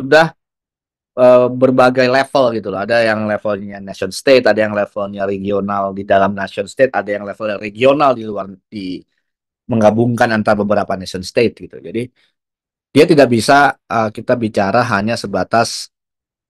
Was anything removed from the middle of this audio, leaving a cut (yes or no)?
no